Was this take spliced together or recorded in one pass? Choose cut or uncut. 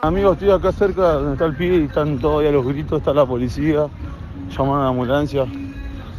uncut